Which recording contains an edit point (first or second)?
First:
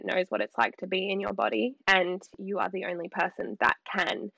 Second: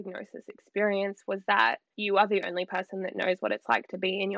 second